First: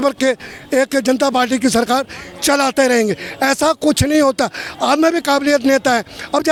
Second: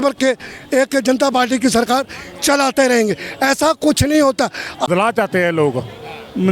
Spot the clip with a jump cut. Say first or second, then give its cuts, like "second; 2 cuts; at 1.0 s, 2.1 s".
second; 1 cut; at 4.9 s